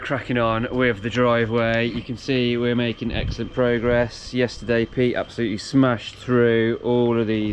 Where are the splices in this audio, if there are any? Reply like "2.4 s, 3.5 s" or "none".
none